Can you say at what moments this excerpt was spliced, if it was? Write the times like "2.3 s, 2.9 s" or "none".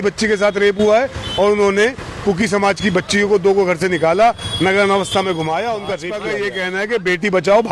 6.1 s